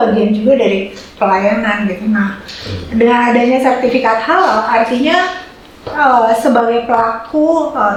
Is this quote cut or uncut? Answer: uncut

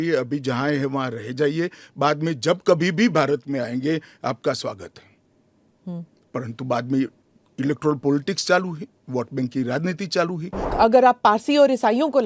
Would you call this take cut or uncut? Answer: cut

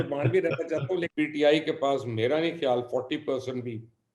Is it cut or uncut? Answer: cut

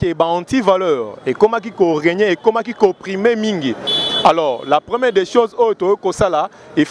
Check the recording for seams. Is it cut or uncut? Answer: uncut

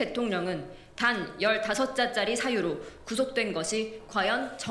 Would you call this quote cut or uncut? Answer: uncut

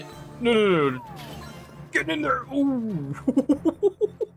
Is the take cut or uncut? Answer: uncut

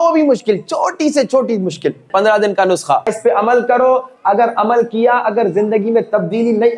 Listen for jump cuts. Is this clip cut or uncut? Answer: cut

